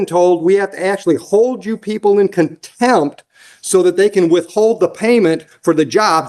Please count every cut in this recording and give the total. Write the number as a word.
zero